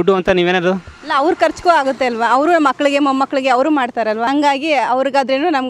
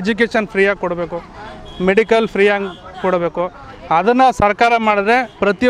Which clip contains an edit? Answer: first; 1 cut; at 4.3 s

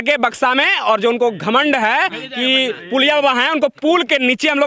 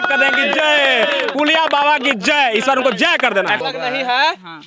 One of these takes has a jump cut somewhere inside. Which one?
second; 1 cut; at 3.6 s

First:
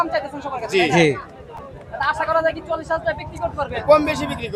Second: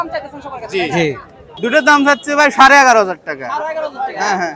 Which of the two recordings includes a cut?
second; 1 cut; at 1.4 s

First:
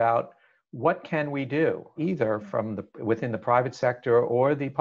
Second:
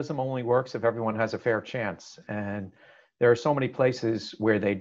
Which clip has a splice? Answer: first; 1 cut; at 2.0 s

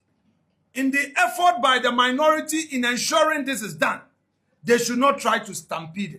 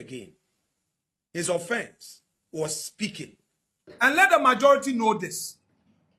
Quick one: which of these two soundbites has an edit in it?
second; 1 cut; at 3.9 s

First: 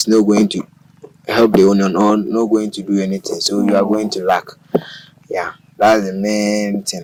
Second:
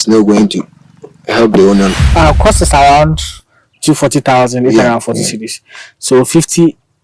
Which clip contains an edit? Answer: second; 1 cut; at 1.9 s

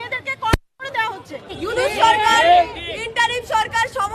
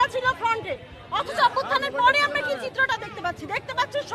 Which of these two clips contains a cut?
first; 1 cut; at 1.5 s

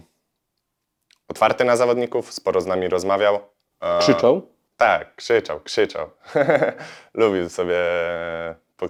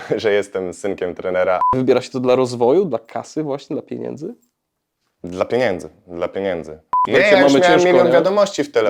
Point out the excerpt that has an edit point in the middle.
second; 2 cuts; at 1.7 s, 6.9 s

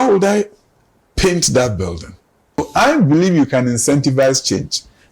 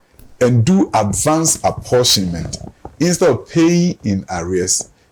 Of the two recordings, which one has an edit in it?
first; 1 cut; at 2.6 s

